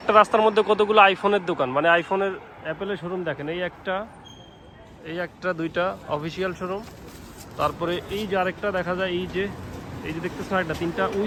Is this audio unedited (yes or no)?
yes